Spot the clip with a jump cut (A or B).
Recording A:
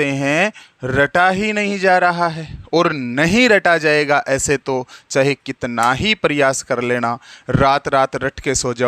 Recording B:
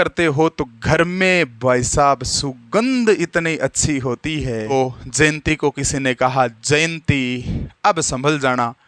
B